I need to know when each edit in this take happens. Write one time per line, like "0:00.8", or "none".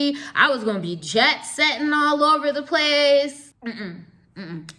0:03.5